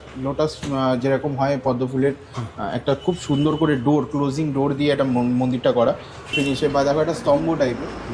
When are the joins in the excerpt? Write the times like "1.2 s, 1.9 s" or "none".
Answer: 6.3 s